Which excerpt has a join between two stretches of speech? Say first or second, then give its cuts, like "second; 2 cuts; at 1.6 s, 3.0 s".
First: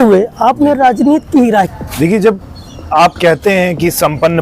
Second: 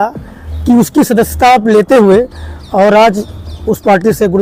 first; 1 cut; at 1.7 s